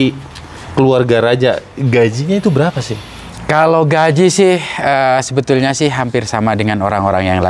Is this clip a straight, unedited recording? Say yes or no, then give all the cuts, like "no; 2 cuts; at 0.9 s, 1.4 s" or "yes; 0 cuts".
yes; 0 cuts